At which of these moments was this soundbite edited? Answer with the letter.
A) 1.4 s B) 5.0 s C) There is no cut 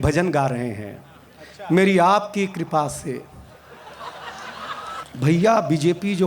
B